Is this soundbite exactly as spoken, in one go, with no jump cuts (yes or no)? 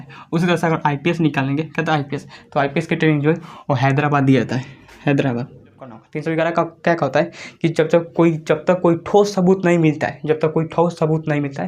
no